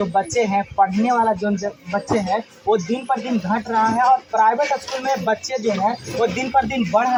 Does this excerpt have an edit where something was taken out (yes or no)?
no